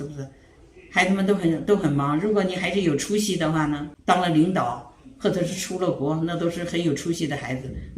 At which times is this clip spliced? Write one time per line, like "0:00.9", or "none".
0:03.9